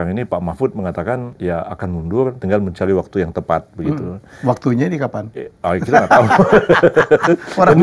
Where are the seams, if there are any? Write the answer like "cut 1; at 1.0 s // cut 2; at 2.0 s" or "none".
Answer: cut 1; at 1.3 s // cut 2; at 2.4 s